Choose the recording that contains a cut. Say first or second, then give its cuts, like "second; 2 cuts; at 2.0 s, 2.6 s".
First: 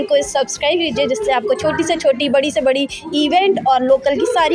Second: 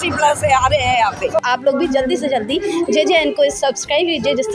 second; 1 cut; at 1.4 s